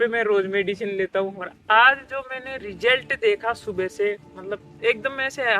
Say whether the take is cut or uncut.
cut